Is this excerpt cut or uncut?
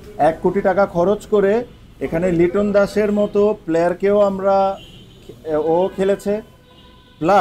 uncut